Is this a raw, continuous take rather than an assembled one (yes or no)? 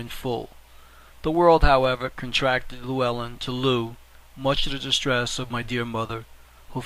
yes